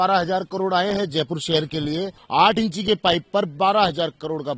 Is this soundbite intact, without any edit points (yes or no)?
no